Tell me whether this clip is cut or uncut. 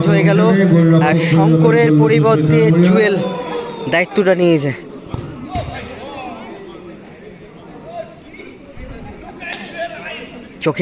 uncut